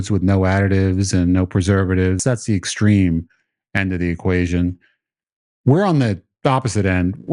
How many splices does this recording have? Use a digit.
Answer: 1